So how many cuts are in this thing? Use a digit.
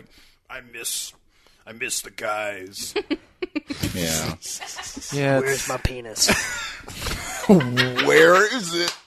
0